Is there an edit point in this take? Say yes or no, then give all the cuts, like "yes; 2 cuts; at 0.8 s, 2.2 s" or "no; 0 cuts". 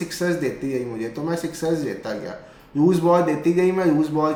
no; 0 cuts